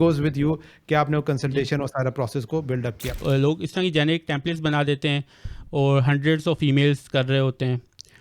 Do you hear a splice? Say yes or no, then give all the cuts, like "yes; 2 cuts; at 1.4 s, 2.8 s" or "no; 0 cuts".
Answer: yes; 1 cut; at 3.2 s